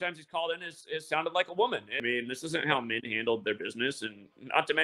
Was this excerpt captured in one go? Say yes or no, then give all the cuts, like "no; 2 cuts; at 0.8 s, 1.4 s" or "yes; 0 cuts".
no; 1 cut; at 1.9 s